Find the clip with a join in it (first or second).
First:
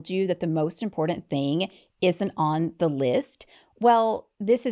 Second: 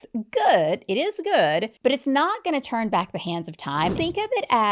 second